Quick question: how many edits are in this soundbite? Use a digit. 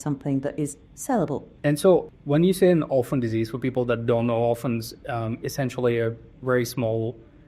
2